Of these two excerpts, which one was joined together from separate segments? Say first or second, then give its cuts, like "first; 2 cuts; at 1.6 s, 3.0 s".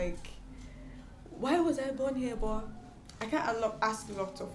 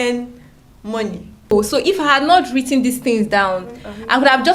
second; 1 cut; at 1.5 s